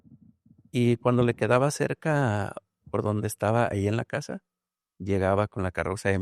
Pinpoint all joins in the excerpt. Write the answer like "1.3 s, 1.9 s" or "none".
none